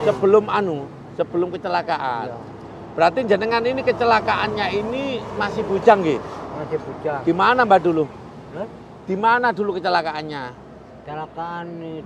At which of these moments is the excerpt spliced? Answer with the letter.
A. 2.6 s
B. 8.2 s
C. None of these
C